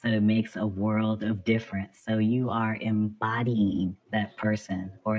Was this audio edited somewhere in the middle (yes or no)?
yes